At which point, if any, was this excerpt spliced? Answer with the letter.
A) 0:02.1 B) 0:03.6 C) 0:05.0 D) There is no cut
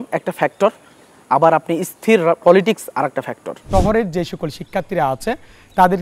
B